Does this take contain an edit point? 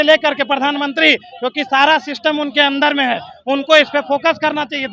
no; 0 cuts

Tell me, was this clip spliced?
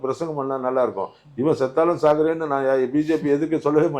no; 0 cuts

